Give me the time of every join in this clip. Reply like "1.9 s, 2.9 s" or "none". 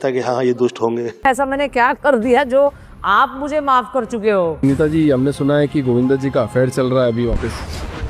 1.1 s

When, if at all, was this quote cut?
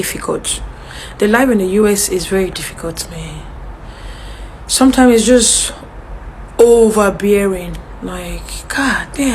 2.3 s

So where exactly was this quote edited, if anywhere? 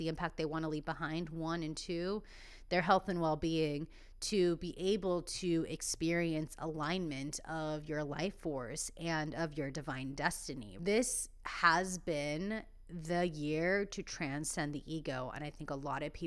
10.7 s

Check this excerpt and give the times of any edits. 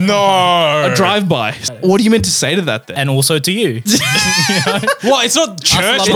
1.7 s, 2.9 s

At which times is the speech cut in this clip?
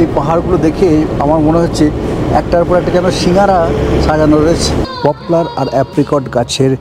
4.9 s

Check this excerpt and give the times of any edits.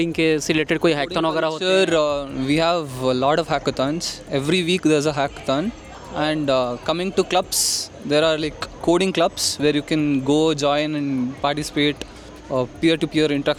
none

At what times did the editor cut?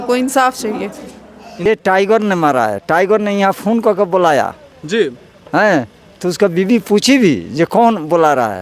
1.6 s

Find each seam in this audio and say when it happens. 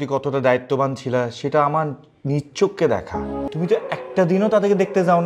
3.5 s

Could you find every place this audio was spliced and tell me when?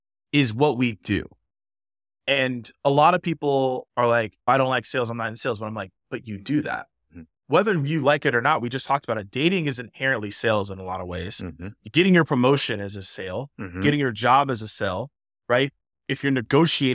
4.5 s, 11.8 s

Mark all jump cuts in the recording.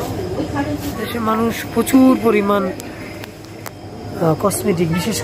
1.2 s

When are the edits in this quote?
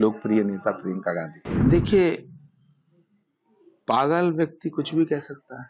1.4 s

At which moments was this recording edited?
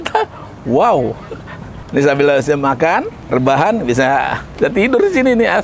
1.8 s, 3.2 s, 4.4 s

